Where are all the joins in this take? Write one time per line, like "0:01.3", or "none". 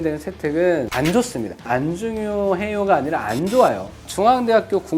0:01.1